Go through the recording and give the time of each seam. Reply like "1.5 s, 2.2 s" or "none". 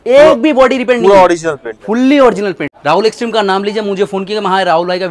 2.7 s